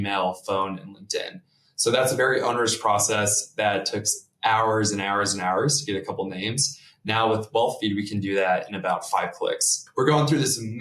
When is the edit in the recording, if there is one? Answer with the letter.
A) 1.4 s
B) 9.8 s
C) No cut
B